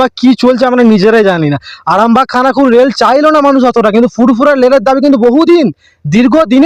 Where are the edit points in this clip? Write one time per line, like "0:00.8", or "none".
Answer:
none